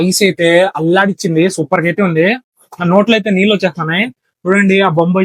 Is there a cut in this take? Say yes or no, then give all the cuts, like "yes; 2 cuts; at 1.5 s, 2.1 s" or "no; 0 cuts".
no; 0 cuts